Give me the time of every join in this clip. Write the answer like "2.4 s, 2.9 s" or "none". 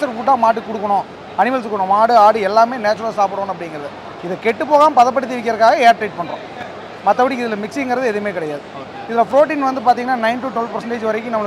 none